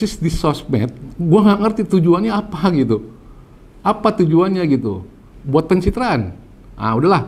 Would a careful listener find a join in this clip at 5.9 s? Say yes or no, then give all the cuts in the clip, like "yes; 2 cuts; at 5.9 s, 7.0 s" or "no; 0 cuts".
no; 0 cuts